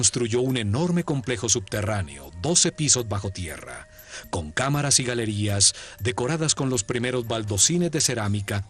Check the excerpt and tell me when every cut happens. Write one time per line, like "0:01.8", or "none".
none